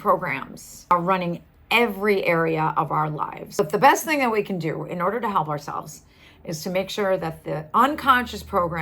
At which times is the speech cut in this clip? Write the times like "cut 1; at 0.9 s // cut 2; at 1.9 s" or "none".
cut 1; at 0.9 s // cut 2; at 3.6 s